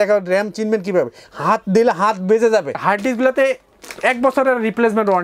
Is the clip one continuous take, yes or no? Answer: no